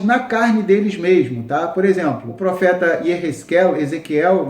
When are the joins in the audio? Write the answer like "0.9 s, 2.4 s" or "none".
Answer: 2.3 s